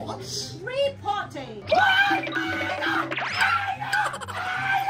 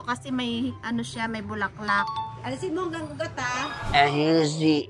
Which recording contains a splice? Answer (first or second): second